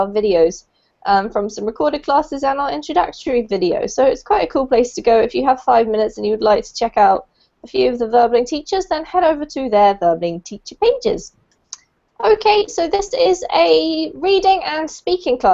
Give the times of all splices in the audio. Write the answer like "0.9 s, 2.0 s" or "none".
12.9 s